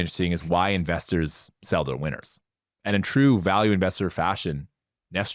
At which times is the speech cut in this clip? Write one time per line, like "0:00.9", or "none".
none